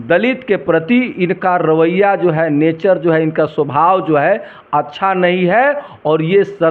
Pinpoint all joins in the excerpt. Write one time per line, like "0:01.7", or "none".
none